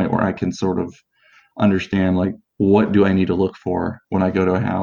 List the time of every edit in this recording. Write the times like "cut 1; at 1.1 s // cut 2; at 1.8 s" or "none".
none

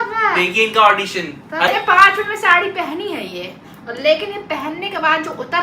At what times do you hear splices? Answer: cut 1; at 1.7 s

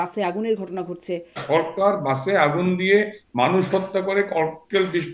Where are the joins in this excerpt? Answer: cut 1; at 1.4 s

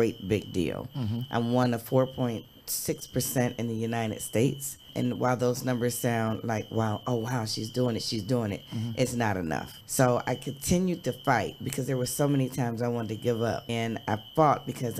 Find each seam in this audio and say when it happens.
none

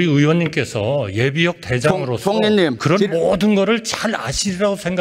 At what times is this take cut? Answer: cut 1; at 2.8 s

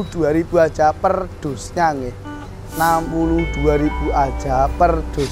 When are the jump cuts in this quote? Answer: none

